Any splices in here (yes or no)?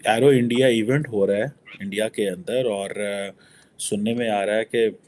no